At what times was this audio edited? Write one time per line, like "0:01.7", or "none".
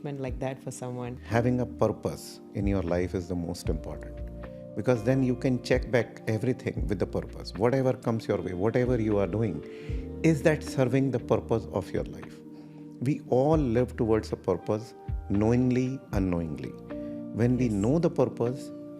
0:01.1